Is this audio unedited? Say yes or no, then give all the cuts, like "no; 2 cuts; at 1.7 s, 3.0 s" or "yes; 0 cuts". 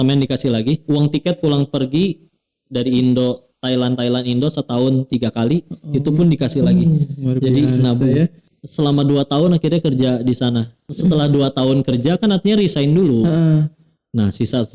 no; 2 cuts; at 8.5 s, 10.9 s